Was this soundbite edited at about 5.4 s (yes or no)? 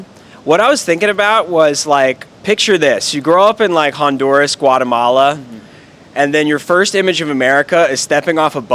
no